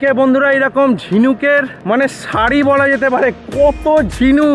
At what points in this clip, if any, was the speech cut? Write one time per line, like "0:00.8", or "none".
0:01.7